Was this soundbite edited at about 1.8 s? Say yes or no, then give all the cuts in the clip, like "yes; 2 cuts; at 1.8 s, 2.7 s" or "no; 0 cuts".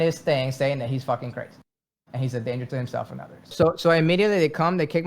no; 1 cut; at 3.5 s